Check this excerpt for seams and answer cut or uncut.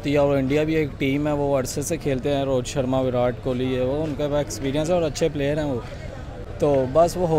uncut